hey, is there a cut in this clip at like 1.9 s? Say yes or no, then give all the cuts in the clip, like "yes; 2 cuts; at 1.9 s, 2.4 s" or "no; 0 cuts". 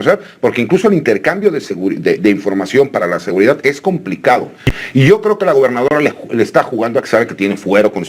no; 1 cut; at 4.7 s